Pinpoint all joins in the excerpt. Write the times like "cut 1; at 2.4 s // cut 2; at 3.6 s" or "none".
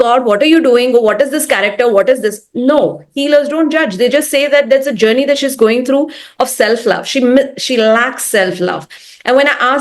none

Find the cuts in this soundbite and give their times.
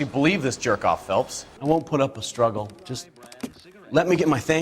cut 1; at 1.4 s

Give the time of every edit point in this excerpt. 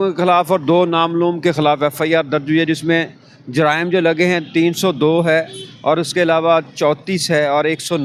none

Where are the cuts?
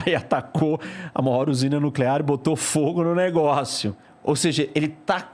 cut 1; at 4.1 s

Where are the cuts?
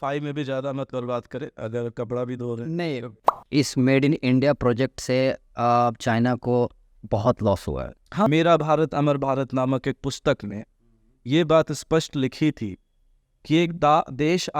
cut 1; at 3.1 s // cut 2; at 8.3 s

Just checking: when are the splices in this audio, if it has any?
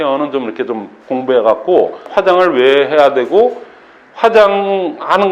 cut 1; at 2.0 s

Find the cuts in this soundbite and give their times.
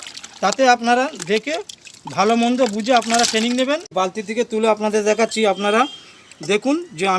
cut 1; at 3.9 s

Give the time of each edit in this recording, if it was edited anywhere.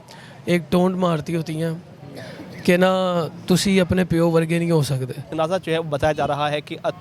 cut 1; at 5.3 s

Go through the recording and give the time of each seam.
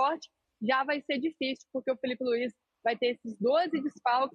none

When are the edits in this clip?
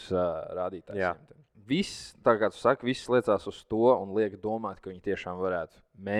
cut 1; at 1.5 s

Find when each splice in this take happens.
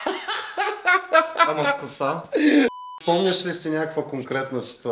cut 1; at 2.9 s

